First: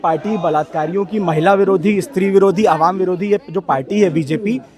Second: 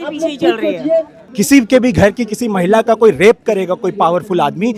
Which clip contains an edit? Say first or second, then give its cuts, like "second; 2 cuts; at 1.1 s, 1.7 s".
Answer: second; 1 cut; at 1.2 s